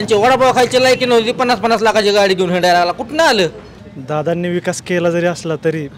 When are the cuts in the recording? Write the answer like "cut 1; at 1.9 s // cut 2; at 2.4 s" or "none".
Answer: none